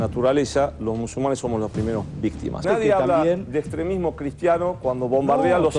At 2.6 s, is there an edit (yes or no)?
yes